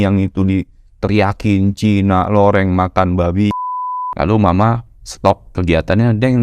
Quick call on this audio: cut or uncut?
cut